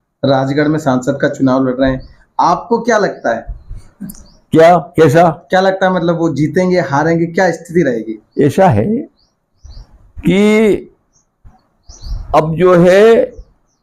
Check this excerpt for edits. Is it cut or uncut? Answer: uncut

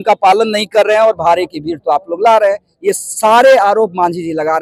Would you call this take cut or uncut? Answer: uncut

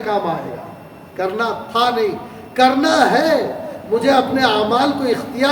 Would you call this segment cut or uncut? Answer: uncut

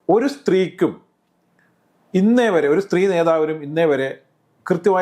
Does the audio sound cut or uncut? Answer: uncut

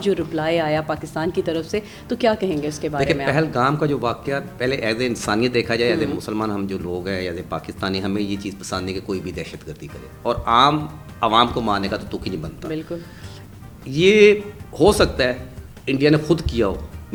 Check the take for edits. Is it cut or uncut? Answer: uncut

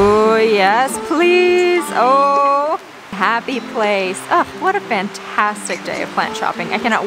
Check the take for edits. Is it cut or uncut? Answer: cut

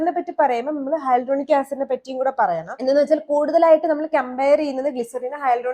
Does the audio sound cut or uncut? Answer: uncut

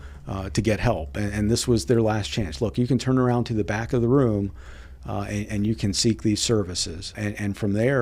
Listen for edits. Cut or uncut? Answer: cut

